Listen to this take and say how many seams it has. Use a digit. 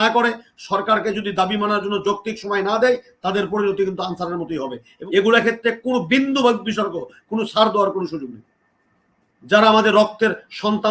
1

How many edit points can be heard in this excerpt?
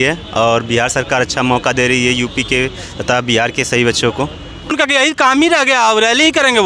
1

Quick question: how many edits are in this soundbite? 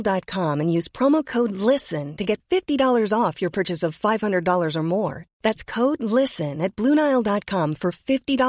0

